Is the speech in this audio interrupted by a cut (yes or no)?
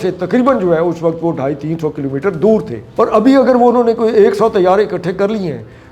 yes